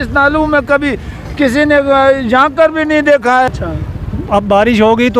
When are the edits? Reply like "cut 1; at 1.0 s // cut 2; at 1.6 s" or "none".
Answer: cut 1; at 3.5 s